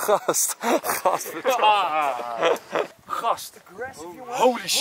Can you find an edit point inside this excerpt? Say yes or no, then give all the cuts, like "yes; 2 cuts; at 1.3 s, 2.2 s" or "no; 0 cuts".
yes; 1 cut; at 3.0 s